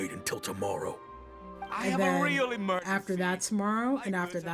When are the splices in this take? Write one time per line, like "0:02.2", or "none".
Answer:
none